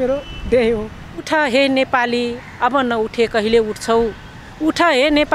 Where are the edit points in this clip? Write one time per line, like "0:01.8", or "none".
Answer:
0:01.3